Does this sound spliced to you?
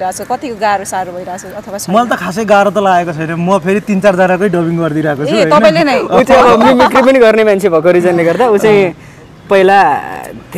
no; 0 cuts

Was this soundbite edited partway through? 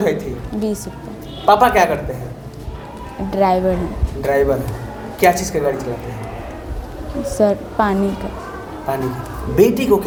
no; 0 cuts

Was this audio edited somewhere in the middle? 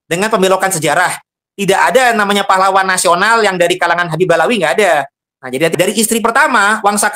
yes; 1 cut; at 5.7 s

